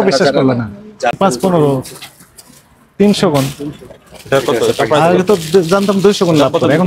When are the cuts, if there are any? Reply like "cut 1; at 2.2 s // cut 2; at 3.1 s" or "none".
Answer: cut 1; at 1.1 s